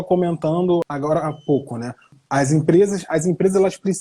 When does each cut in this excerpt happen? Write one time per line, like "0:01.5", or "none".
0:00.9
0:02.1